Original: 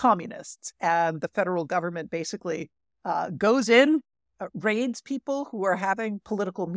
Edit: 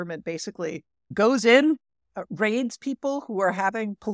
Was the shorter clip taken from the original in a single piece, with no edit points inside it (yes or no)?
no